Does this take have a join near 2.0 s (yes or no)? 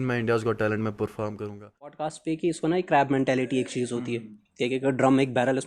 yes